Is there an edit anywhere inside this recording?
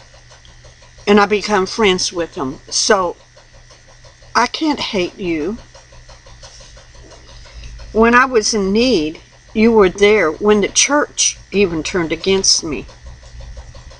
yes; 1 cut; at 4.8 s

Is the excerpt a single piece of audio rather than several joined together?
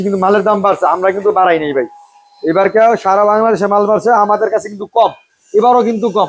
yes; 0 cuts

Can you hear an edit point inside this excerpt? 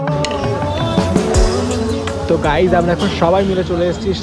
no; 0 cuts

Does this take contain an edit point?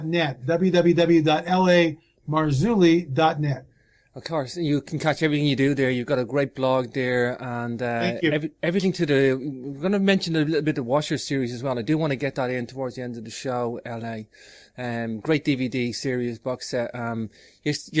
no; 0 cuts

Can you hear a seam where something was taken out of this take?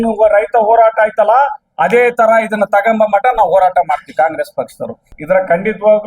yes; 1 cut; at 5.1 s

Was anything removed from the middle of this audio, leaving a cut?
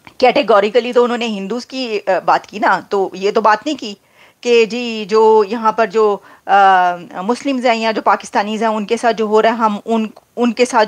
no; 0 cuts

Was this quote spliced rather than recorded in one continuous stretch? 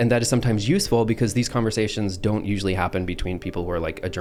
no; 0 cuts

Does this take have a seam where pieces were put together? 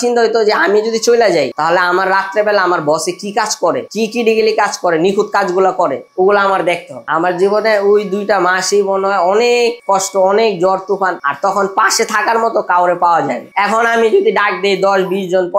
yes; 1 cut; at 6.9 s

